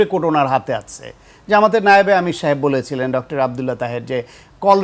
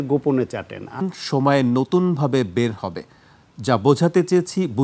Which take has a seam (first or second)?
second